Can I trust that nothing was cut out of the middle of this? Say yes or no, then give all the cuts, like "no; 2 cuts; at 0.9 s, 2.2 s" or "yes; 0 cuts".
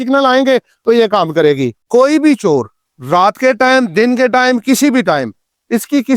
no; 1 cut; at 1.8 s